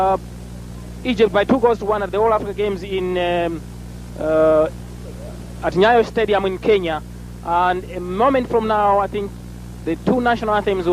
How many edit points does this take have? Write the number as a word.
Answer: zero